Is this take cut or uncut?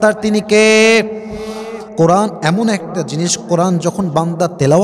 cut